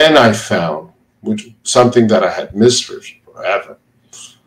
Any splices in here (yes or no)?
no